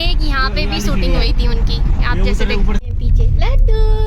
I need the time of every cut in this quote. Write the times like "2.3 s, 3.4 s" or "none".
2.8 s